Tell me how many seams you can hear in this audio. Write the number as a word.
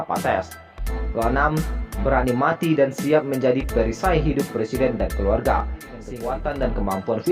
one